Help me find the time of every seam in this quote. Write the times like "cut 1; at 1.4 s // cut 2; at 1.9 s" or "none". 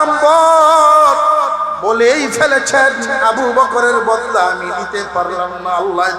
cut 1; at 1.7 s